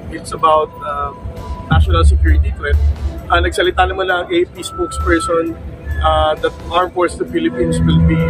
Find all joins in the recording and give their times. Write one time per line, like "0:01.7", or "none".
none